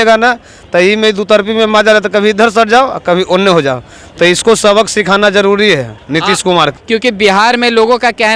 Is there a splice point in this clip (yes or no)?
no